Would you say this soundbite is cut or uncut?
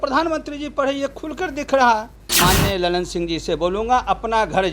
cut